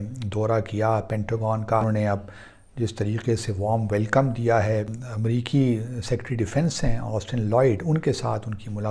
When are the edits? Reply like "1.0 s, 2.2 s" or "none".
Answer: 1.8 s, 5.0 s